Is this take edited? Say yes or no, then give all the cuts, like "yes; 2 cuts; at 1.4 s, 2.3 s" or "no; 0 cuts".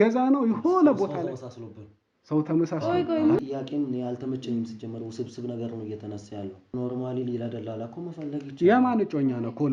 yes; 2 cuts; at 3.4 s, 6.7 s